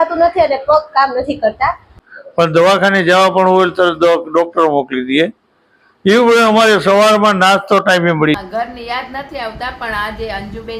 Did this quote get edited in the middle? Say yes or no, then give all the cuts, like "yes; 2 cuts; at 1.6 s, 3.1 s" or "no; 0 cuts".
yes; 2 cuts; at 2.0 s, 8.4 s